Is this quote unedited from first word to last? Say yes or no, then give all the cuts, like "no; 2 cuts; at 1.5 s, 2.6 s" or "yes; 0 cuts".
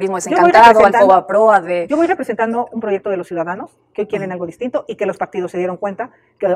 yes; 0 cuts